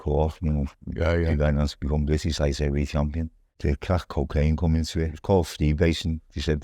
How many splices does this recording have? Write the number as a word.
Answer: two